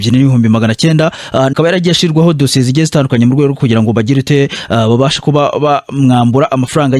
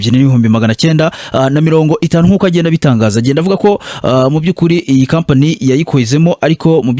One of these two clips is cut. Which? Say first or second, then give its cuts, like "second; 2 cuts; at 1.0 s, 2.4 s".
first; 1 cut; at 1.5 s